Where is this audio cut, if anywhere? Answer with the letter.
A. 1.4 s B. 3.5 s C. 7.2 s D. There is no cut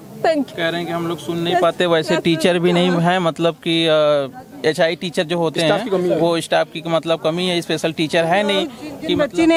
D